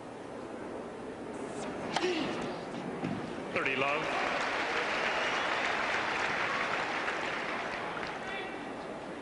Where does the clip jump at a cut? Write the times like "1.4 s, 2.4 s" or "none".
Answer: 5.3 s